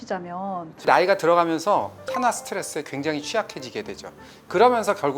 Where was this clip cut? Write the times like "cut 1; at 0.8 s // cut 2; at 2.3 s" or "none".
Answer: cut 1; at 0.8 s // cut 2; at 2.0 s